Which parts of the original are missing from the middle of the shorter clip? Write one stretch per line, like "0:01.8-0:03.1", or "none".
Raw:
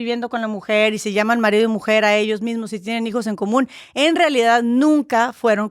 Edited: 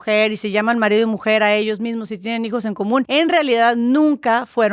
0:03.7-0:03.9